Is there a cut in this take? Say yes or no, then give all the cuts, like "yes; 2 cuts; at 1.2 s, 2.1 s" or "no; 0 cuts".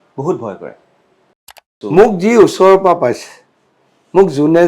yes; 1 cut; at 1.7 s